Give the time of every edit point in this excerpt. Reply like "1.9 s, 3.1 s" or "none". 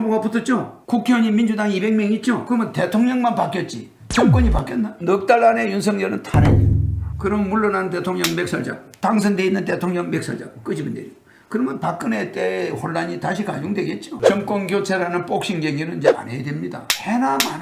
none